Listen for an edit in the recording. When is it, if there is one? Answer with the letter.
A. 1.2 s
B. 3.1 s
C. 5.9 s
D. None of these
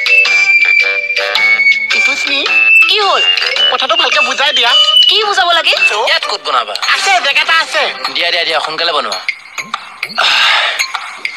C